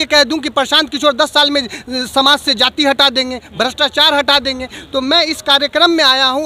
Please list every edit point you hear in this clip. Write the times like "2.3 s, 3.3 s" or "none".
none